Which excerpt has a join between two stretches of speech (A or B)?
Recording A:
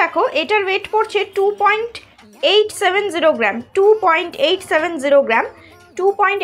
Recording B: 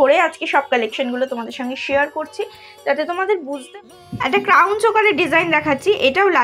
B